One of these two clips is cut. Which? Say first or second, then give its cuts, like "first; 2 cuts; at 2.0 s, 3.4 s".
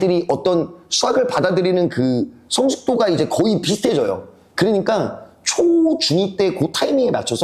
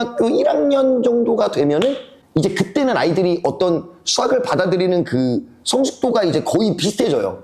second; 1 cut; at 2.1 s